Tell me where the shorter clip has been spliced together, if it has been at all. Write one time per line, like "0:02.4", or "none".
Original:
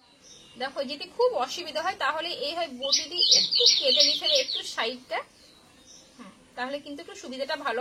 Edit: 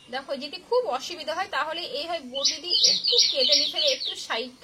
none